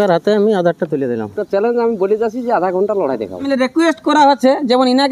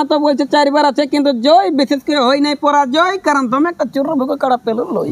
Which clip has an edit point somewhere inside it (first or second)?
first